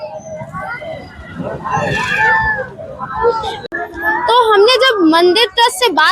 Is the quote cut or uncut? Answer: cut